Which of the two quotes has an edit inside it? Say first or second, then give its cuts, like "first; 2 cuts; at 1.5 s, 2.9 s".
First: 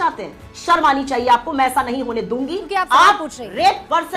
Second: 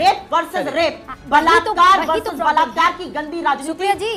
first; 1 cut; at 2.7 s